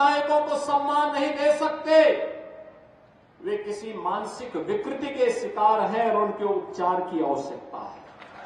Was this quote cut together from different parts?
no; 0 cuts

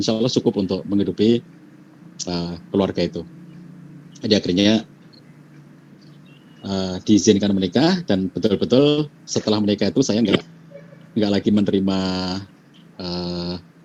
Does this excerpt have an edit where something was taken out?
no; 0 cuts

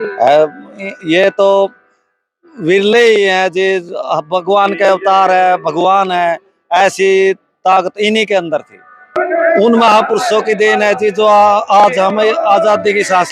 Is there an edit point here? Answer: yes; 1 cut; at 9.1 s

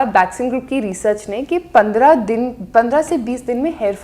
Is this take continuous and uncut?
yes; 0 cuts

